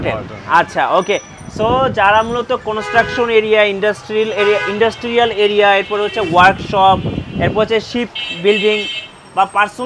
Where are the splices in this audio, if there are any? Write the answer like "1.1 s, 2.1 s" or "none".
none